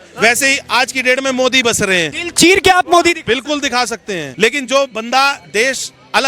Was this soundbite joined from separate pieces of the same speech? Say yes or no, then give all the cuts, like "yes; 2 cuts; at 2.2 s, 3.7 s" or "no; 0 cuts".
yes; 2 cuts; at 2.2 s, 4.3 s